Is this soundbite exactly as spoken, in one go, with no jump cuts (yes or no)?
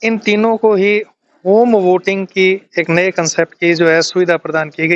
yes